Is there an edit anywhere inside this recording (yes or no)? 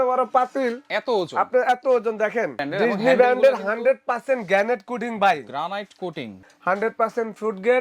yes